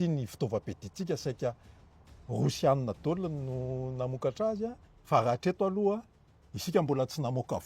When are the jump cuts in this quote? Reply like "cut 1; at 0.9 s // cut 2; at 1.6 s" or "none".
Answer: cut 1; at 4.9 s